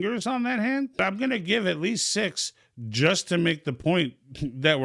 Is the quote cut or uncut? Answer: cut